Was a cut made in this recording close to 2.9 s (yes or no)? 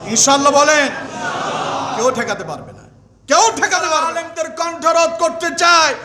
no